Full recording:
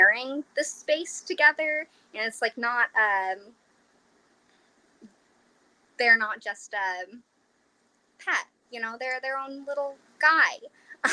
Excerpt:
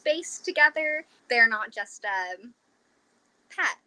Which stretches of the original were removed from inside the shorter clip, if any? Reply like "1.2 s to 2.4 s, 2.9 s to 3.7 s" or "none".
1.9 s to 5.8 s